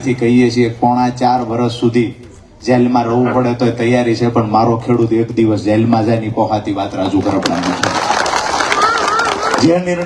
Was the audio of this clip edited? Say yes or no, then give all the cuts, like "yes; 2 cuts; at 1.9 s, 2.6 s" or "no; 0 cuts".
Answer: no; 0 cuts